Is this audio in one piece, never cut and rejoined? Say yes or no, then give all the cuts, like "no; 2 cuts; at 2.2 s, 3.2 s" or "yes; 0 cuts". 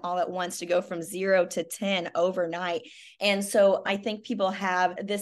no; 1 cut; at 3.9 s